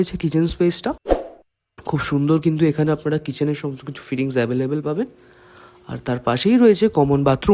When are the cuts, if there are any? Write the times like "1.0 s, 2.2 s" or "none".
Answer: none